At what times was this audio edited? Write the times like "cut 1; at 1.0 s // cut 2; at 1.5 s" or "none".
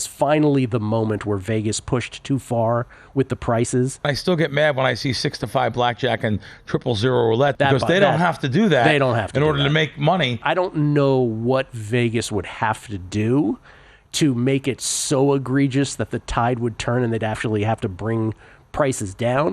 cut 1; at 4.1 s // cut 2; at 7.5 s // cut 3; at 10.4 s